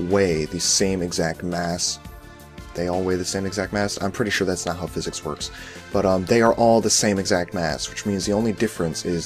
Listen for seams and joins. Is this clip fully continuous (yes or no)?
yes